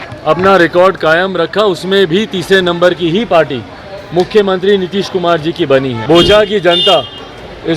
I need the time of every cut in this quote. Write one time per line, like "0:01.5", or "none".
0:06.0